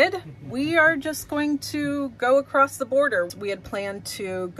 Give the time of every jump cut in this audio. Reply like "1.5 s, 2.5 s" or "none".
3.3 s